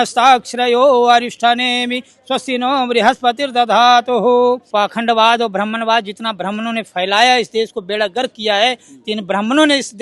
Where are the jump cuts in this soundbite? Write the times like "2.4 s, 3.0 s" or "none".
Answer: 4.6 s

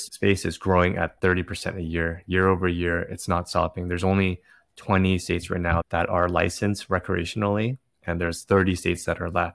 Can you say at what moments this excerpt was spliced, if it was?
5.8 s

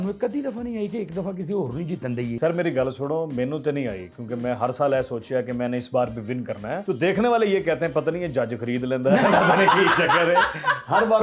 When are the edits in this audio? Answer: 6.8 s

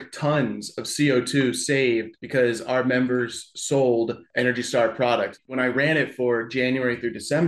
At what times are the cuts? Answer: 2.2 s, 4.2 s, 5.4 s

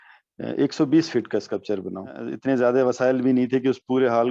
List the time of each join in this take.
2.3 s

